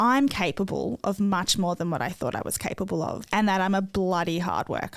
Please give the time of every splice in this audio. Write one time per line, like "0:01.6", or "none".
0:03.2